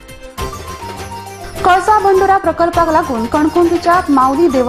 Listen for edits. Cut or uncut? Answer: uncut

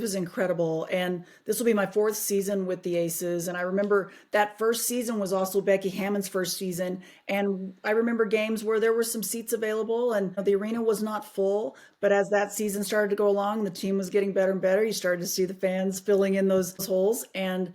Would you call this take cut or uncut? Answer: cut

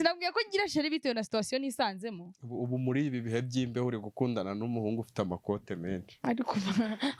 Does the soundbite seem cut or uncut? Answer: uncut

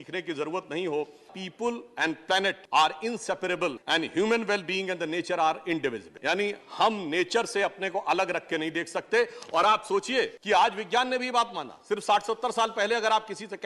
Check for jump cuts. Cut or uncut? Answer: cut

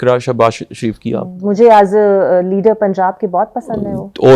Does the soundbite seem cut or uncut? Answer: cut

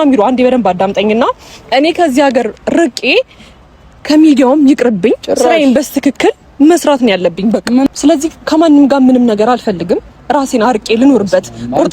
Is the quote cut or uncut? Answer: cut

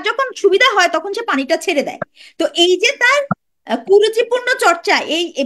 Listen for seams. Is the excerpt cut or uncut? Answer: uncut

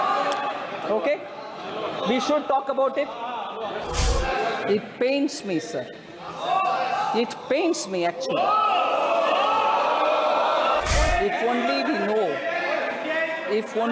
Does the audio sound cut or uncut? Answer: cut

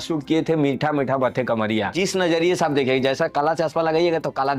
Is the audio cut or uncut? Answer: cut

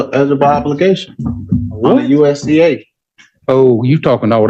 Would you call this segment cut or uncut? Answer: uncut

